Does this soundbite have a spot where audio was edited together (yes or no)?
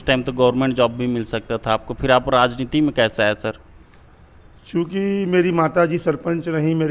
no